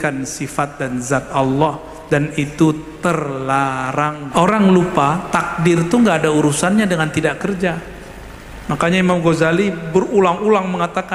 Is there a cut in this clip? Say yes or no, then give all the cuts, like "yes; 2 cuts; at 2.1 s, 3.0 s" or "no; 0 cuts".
yes; 1 cut; at 4.2 s